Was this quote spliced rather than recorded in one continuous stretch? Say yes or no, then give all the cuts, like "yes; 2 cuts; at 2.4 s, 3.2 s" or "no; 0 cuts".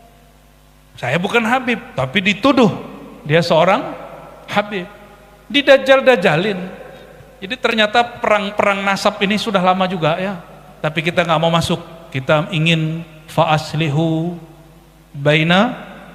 no; 0 cuts